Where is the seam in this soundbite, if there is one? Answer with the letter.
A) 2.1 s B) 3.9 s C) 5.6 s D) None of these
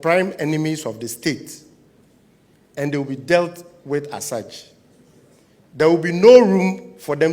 D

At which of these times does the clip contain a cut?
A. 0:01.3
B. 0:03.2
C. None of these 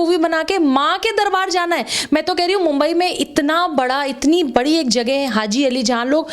C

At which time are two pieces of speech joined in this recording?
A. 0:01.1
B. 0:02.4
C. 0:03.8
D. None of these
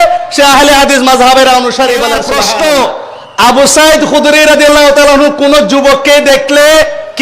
B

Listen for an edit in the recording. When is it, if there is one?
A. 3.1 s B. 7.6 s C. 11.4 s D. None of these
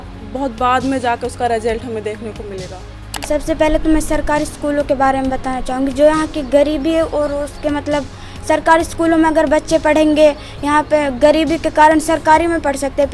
A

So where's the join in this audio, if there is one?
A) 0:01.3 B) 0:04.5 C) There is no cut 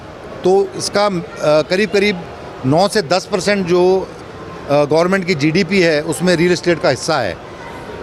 C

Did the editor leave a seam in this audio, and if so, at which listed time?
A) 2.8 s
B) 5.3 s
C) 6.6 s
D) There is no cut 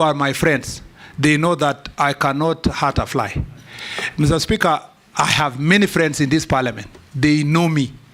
D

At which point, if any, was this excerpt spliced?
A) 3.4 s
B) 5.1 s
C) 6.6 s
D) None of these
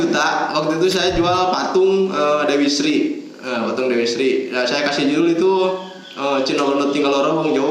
D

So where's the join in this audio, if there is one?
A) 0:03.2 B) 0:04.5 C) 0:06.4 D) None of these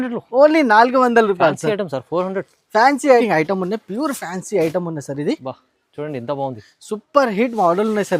A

